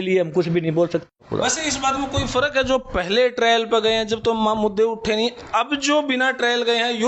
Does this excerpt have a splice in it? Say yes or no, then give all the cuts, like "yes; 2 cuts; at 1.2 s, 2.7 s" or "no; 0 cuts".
yes; 1 cut; at 1.5 s